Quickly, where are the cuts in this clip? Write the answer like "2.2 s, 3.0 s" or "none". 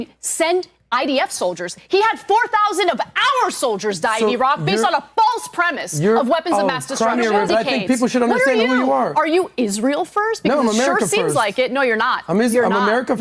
7.5 s